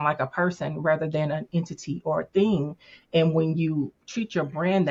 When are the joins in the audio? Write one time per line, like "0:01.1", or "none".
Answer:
none